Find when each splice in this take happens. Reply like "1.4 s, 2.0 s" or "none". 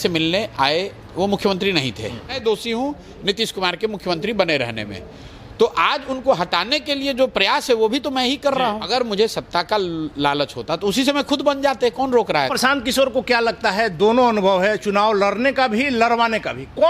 2.3 s, 8.8 s, 12.5 s